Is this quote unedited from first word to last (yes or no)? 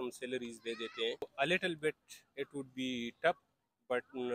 no